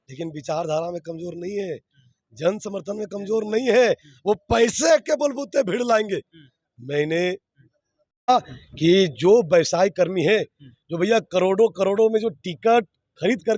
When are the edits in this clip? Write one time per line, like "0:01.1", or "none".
none